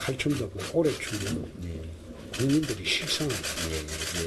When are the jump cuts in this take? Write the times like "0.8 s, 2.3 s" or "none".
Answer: 2.3 s